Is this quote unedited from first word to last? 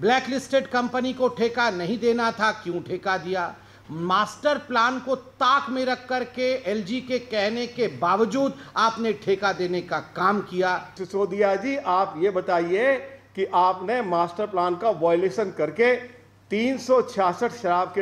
no; 1 cut; at 10.9 s

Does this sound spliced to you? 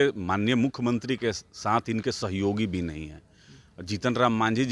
no; 0 cuts

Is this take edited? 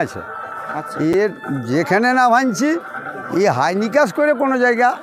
no; 0 cuts

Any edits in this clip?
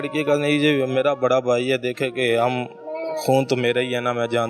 no; 0 cuts

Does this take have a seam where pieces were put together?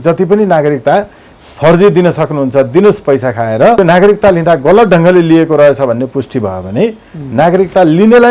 no; 0 cuts

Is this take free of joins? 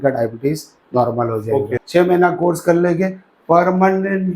no; 1 cut; at 1.8 s

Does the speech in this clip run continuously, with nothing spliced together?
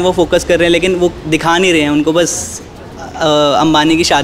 yes; 0 cuts

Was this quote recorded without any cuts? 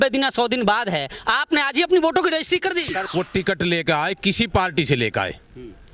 no; 1 cut; at 3.0 s

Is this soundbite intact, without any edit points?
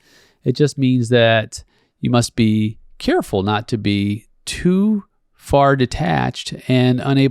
yes; 0 cuts

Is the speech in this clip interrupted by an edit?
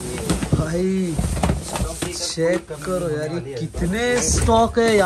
no; 0 cuts

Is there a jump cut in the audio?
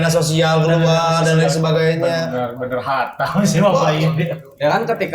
no; 0 cuts

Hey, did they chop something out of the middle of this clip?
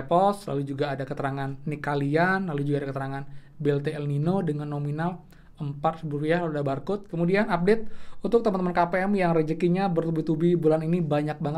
yes; 1 cut; at 7.1 s

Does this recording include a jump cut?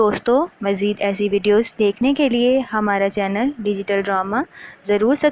no; 0 cuts

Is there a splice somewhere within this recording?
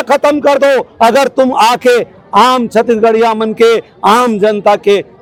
no; 0 cuts

